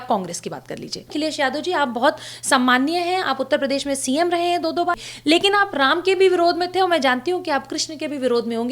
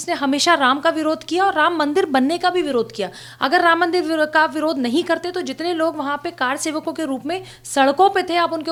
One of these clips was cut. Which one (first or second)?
first